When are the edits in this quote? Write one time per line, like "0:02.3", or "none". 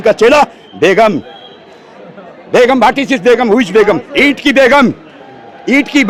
none